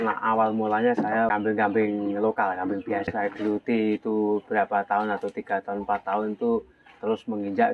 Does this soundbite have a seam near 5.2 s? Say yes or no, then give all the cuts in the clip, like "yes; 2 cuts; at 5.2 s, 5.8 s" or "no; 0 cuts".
no; 2 cuts; at 1.3 s, 3.1 s